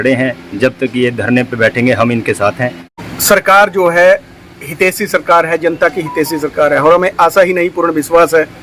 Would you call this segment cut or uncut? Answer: cut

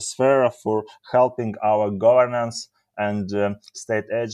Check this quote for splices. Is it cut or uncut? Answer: uncut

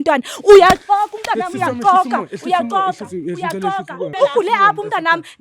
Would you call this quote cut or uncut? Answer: cut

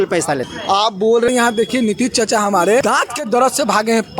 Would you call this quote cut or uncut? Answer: cut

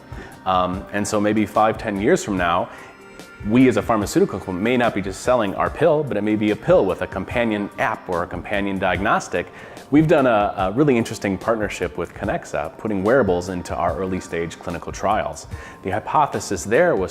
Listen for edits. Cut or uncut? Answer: cut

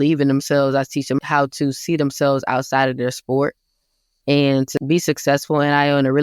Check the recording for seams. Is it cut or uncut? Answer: cut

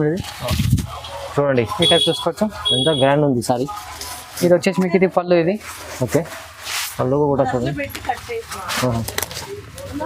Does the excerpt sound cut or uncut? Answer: uncut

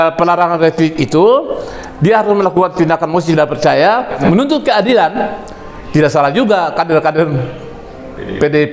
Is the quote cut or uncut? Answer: cut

